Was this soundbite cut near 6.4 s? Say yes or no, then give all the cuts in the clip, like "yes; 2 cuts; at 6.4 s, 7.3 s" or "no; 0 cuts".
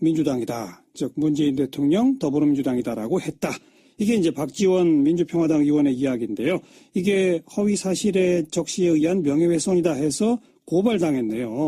no; 0 cuts